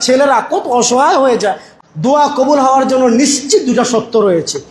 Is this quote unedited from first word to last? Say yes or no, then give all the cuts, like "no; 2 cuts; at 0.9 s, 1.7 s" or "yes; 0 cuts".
no; 1 cut; at 1.7 s